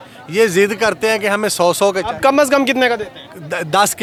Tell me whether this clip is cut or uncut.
uncut